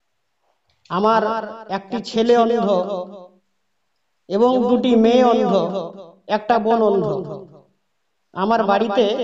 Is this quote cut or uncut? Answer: uncut